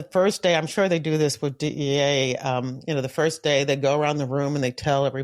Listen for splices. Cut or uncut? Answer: uncut